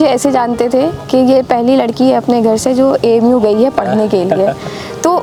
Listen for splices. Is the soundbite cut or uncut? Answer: uncut